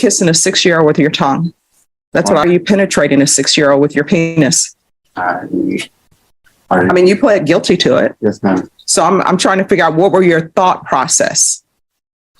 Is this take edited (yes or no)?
yes